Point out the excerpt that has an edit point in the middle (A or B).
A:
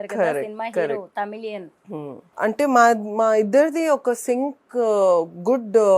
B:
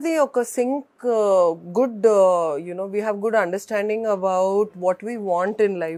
A